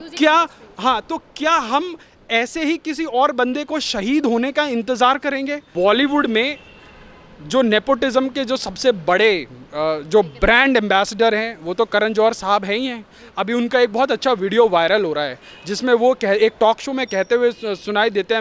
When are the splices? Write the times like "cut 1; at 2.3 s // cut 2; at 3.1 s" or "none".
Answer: cut 1; at 5.6 s